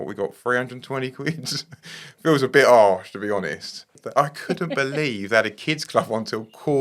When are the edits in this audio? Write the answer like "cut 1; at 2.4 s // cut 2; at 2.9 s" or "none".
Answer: cut 1; at 4.0 s